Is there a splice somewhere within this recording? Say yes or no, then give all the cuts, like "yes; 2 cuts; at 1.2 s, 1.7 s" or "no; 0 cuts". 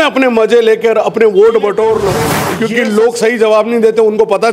yes; 1 cut; at 2.4 s